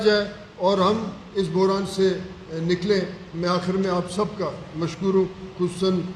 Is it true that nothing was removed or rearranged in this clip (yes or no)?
yes